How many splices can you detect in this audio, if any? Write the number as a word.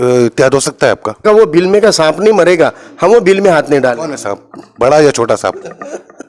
one